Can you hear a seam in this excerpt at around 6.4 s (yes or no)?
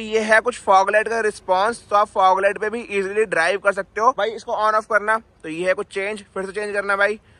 no